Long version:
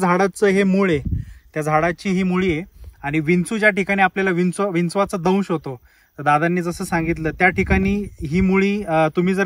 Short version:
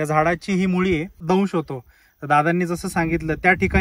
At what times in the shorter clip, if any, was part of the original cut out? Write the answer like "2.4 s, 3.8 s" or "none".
1.2 s